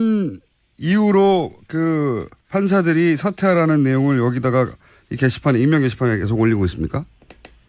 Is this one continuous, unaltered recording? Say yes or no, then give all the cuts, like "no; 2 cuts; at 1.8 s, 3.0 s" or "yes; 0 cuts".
no; 1 cut; at 4.4 s